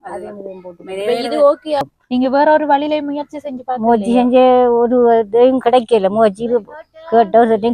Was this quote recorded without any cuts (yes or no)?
no